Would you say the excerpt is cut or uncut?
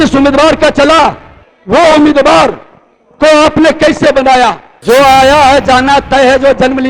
cut